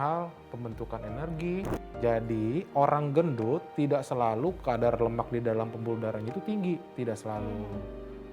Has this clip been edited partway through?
yes; 1 cut; at 1.7 s

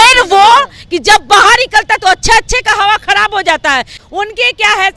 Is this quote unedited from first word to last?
no; 1 cut; at 4.0 s

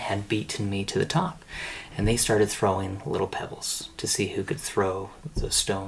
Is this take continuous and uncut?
yes; 0 cuts

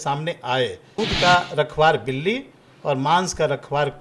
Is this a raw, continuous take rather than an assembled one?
no; 1 cut; at 1.0 s

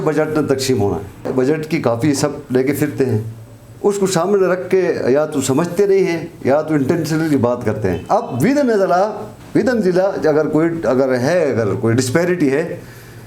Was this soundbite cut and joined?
yes; 1 cut; at 1.3 s

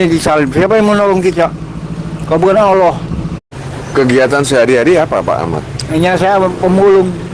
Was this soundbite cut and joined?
yes; 1 cut; at 3.7 s

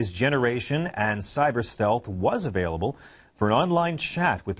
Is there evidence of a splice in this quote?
yes; 1 cut; at 1.5 s

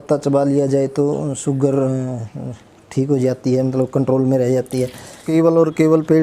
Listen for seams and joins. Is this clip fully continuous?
no; 1 cut; at 5.2 s

